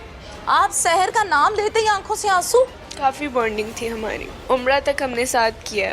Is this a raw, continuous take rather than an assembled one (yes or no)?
no